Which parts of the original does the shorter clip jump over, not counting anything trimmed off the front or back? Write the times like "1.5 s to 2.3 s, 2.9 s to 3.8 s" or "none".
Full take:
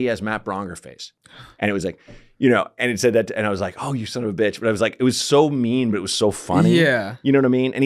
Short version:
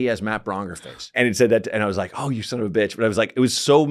1.1 s to 2.7 s